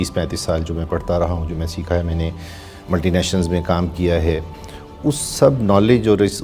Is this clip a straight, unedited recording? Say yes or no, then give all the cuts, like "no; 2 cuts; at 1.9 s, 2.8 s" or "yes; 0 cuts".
yes; 0 cuts